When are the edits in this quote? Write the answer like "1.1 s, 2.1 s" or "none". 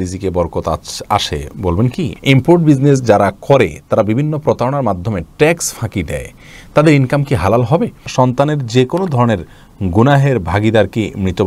2.1 s, 8.0 s